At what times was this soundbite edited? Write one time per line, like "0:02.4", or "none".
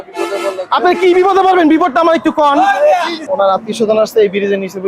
0:03.1